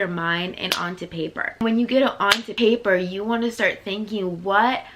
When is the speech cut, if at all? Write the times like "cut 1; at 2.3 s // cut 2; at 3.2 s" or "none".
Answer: cut 1; at 1.6 s // cut 2; at 2.5 s